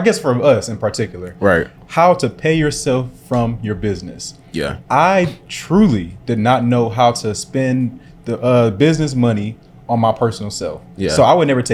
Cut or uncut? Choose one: uncut